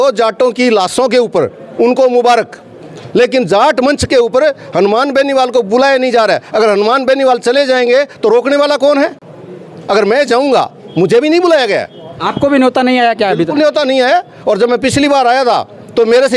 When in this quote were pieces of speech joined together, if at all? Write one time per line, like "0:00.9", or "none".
none